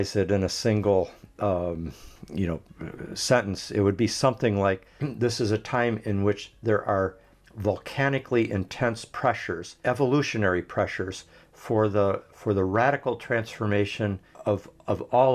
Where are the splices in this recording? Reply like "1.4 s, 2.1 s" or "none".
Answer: 4.9 s, 9.7 s, 14.3 s